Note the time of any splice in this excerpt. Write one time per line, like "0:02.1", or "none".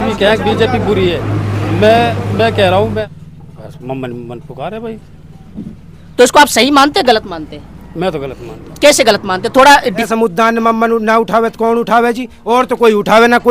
0:03.0
0:10.1